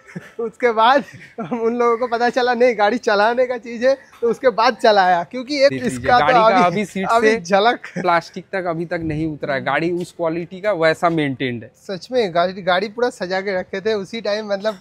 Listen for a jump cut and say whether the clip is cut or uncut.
cut